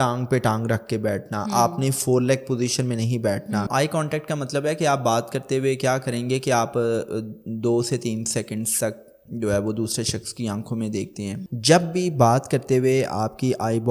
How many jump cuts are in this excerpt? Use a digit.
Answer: 2